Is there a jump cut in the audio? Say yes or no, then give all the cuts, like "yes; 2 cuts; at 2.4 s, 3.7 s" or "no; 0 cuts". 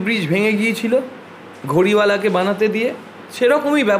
no; 0 cuts